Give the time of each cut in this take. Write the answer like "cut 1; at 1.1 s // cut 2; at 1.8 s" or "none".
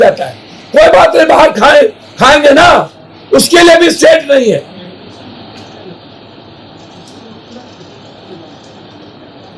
none